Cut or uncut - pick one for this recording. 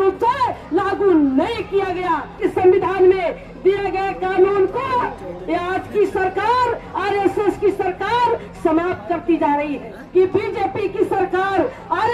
cut